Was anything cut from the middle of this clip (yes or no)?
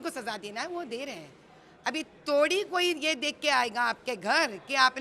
no